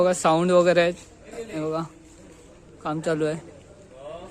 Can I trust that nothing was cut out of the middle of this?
yes; 0 cuts

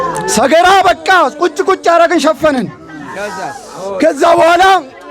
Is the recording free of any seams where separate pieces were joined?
yes; 0 cuts

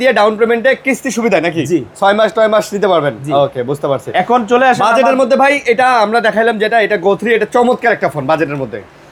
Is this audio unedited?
yes; 0 cuts

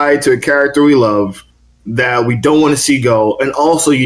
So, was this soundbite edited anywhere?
no; 0 cuts

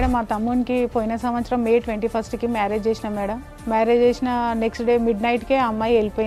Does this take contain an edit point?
no; 0 cuts

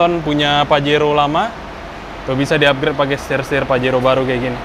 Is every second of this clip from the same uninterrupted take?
yes; 0 cuts

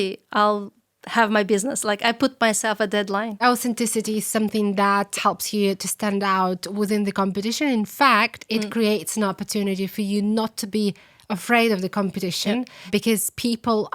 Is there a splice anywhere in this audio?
yes; 3 cuts; at 3.4 s, 5.2 s, 12.9 s

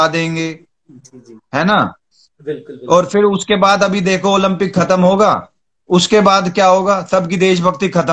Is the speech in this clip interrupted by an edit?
no; 0 cuts

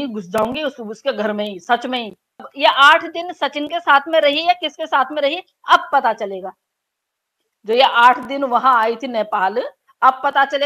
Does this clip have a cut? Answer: yes; 1 cut; at 2.4 s

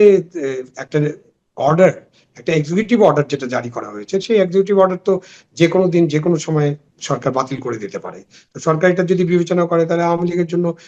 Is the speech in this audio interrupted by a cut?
no; 0 cuts

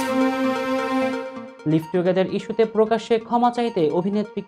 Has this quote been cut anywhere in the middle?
no; 0 cuts

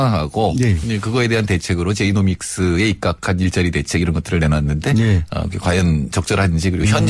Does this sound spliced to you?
no; 0 cuts

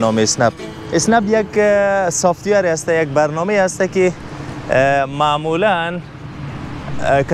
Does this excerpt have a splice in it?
no; 0 cuts

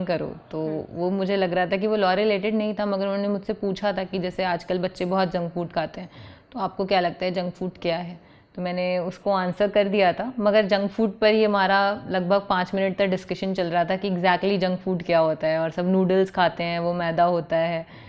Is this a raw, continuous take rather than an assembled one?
yes; 0 cuts

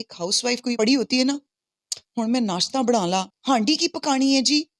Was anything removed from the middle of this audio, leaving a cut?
yes; 2 cuts; at 0.8 s, 3.3 s

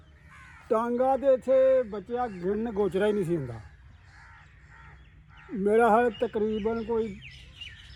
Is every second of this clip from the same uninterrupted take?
yes; 0 cuts

